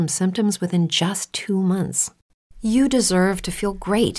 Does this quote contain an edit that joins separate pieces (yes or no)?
no